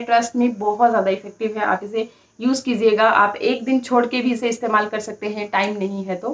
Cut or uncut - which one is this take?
uncut